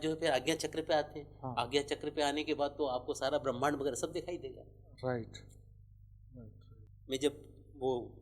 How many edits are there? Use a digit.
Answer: 1